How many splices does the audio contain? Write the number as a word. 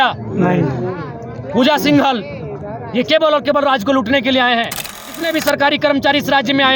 one